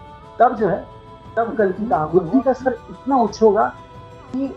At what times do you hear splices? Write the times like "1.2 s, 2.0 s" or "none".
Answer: 2.1 s